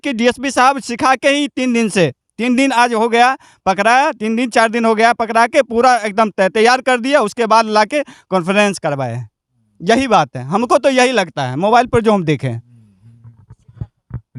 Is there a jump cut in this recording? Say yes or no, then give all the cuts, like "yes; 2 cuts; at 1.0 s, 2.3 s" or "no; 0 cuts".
no; 0 cuts